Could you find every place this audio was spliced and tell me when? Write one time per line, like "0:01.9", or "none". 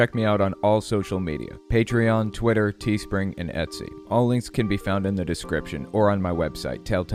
none